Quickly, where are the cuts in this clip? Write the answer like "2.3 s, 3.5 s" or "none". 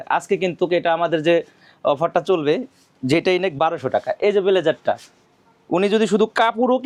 none